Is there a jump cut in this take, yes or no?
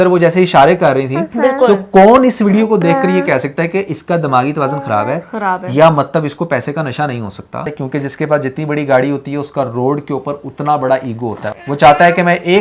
yes